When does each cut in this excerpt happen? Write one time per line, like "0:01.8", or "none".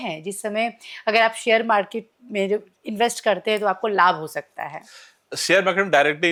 none